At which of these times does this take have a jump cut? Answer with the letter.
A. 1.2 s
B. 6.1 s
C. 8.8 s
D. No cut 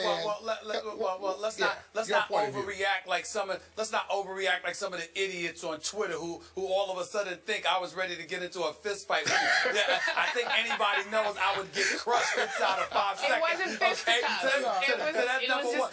D